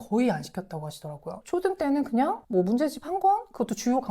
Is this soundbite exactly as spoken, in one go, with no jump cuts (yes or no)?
no